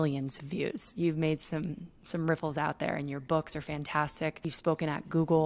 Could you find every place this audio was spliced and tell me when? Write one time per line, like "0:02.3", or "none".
0:04.5

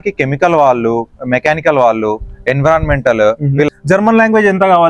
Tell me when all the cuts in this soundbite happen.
0:03.7

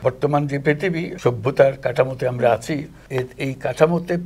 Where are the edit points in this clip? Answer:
0:01.1
0:03.0

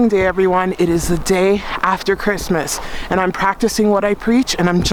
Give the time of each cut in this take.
none

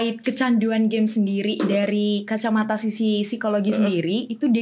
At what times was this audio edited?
none

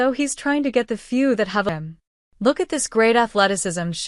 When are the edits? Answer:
0:01.7

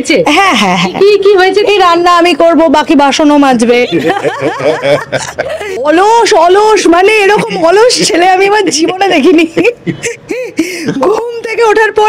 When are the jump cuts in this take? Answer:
0:05.8

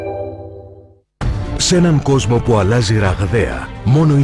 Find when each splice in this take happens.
0:01.1

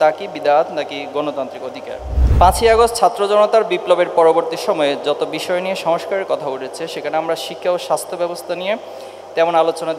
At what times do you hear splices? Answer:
0:02.2

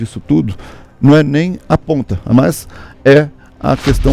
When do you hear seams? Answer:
0:02.1

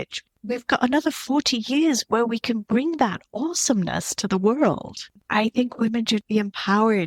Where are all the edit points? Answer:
0:05.1

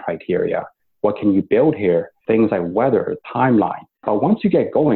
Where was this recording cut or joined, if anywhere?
0:04.0

